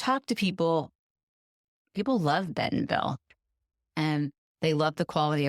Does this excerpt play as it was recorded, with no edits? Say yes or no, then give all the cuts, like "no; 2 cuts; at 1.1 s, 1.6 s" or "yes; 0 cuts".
no; 1 cut; at 1.7 s